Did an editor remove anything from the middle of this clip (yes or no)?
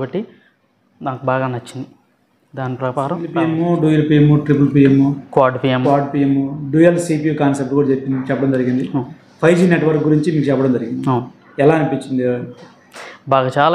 yes